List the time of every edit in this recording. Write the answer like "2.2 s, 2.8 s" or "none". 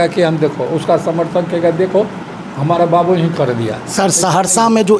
none